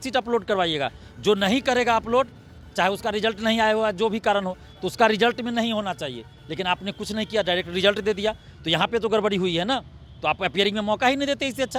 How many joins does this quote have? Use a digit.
0